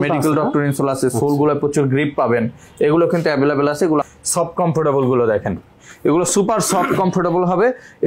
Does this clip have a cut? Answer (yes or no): yes